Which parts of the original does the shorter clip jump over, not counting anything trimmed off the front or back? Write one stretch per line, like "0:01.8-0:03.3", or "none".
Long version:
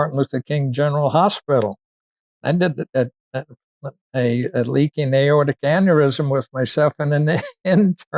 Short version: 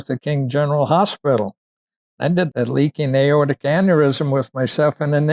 0:02.8-0:04.5